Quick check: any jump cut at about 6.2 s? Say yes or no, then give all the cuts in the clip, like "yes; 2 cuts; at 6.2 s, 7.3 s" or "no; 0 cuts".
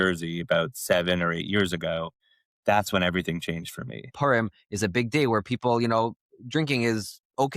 no; 1 cut; at 4.1 s